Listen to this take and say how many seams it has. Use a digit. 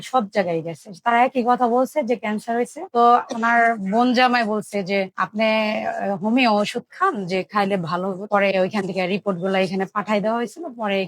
2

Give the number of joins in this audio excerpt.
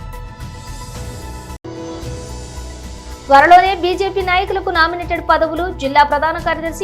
1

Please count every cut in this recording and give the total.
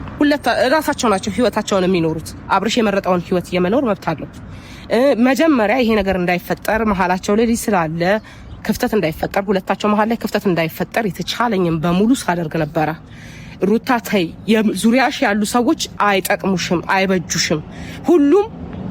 0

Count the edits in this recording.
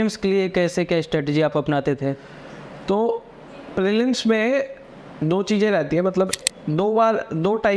1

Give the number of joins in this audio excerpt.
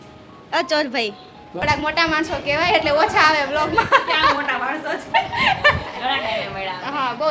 1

